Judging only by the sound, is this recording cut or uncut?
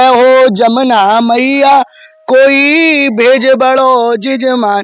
uncut